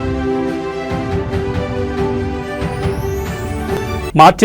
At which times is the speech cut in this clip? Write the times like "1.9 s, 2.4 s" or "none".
none